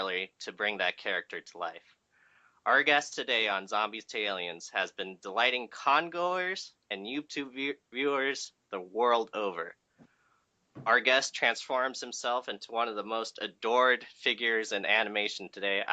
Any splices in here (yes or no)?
no